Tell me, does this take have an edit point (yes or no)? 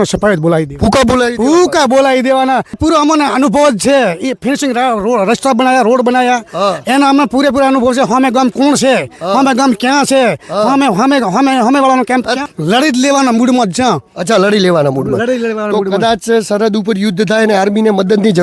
yes